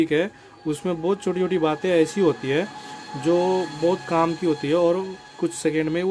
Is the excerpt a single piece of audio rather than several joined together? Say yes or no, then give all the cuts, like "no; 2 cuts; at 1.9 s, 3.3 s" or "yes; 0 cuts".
yes; 0 cuts